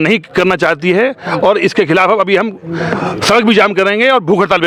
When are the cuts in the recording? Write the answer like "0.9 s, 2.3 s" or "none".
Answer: none